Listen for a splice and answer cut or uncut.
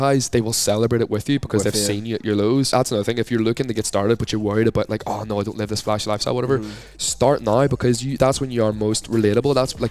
cut